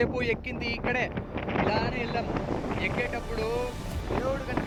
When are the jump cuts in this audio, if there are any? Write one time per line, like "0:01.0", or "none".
none